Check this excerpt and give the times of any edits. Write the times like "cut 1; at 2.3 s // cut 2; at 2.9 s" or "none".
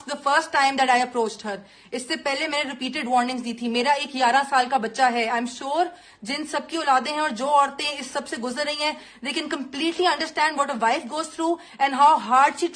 none